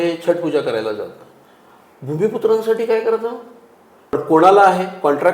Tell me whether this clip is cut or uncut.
cut